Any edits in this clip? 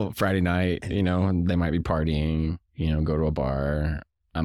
no; 0 cuts

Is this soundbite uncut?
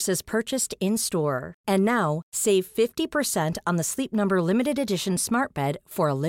yes; 0 cuts

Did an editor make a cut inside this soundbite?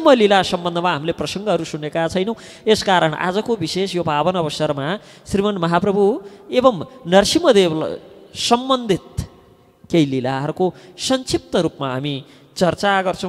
no; 0 cuts

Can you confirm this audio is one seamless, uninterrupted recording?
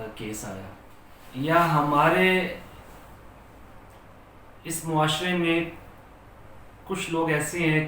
no; 1 cut; at 1.4 s

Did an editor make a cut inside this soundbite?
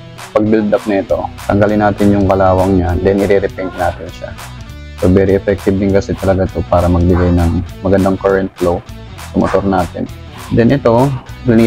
no; 0 cuts

